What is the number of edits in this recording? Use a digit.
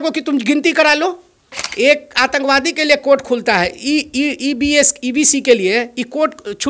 1